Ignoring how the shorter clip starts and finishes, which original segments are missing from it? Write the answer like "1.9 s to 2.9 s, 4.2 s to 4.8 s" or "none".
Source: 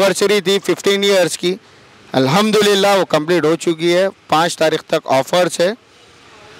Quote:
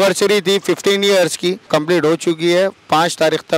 1.7 s to 3.1 s